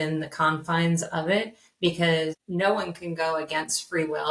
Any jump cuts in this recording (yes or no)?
yes